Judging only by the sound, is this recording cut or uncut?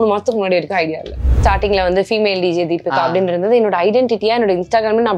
cut